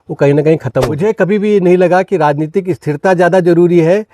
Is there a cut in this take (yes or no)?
yes